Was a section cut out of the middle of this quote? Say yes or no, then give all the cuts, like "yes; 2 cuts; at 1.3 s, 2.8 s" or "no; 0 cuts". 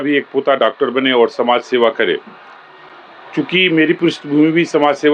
no; 0 cuts